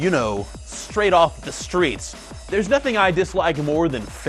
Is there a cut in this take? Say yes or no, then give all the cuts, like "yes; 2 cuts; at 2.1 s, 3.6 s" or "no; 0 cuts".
no; 0 cuts